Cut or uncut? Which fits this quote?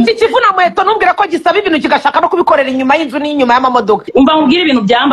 cut